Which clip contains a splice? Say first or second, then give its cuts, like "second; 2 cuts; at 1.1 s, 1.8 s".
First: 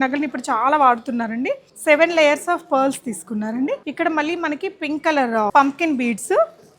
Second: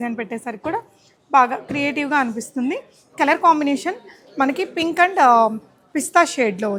first; 3 cuts; at 1.7 s, 3.9 s, 5.5 s